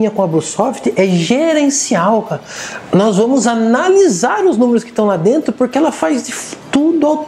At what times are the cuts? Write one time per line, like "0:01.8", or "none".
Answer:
none